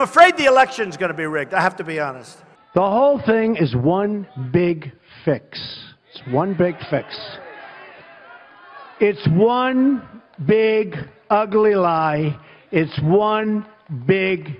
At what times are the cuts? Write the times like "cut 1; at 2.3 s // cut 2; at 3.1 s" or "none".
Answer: cut 1; at 9.2 s